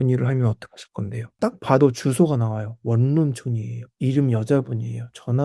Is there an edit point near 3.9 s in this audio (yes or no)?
no